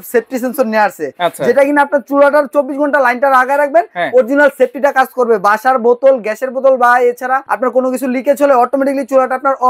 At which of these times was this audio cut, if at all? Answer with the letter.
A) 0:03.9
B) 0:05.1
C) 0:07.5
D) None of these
C